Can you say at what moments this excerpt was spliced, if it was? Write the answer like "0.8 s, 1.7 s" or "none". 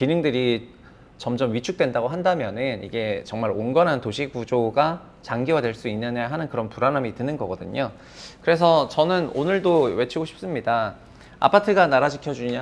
none